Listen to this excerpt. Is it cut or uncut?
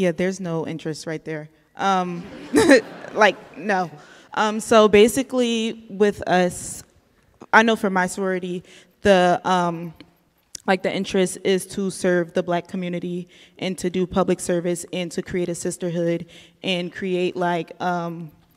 uncut